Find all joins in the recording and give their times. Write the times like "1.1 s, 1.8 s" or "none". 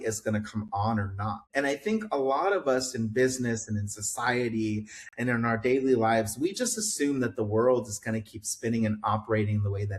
1.4 s